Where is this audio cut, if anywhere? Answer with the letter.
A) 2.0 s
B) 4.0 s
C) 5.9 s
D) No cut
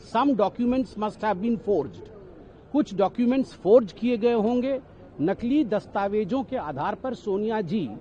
D